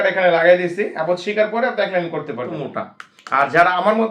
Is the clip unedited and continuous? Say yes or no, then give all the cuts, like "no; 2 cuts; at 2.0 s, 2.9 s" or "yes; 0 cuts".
no; 1 cut; at 2.6 s